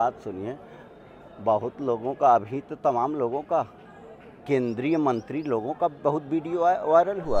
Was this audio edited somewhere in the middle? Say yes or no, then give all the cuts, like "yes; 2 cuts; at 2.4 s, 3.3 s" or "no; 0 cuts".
no; 0 cuts